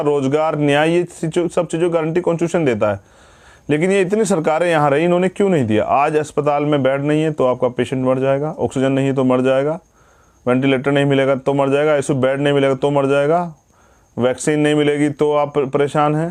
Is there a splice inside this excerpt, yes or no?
no